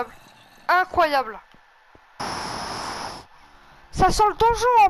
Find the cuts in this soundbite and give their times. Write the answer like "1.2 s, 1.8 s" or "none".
2.2 s